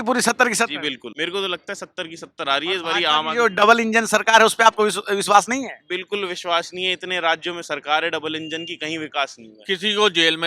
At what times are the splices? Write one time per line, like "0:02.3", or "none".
0:01.1
0:09.5